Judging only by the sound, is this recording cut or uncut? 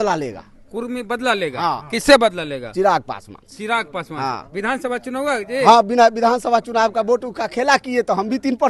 uncut